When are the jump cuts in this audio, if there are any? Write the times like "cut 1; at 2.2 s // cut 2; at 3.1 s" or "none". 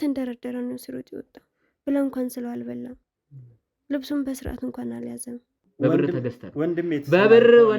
cut 1; at 5.6 s